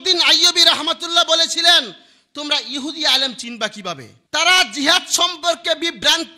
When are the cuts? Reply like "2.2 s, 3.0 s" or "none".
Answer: 4.1 s